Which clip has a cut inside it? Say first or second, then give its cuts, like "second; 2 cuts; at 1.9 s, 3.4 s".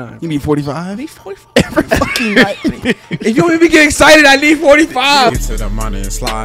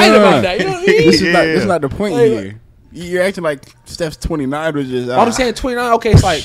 first; 1 cut; at 5.3 s